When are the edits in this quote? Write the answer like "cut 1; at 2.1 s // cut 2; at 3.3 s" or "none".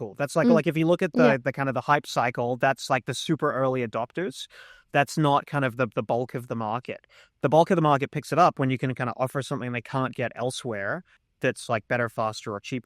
cut 1; at 11.3 s